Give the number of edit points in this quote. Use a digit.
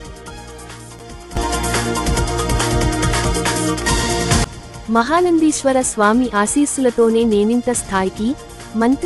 0